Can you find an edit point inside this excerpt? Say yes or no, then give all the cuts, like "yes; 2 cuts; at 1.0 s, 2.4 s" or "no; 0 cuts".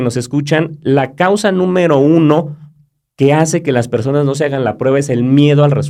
no; 0 cuts